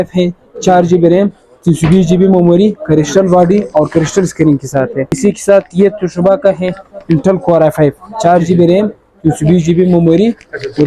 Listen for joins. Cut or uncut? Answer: cut